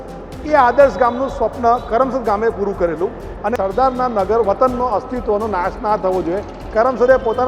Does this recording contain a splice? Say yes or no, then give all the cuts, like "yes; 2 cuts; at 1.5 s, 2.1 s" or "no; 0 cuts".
yes; 1 cut; at 3.5 s